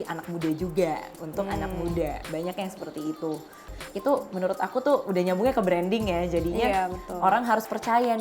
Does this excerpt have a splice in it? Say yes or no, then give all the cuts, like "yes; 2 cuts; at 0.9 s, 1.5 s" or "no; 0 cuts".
yes; 1 cut; at 3.7 s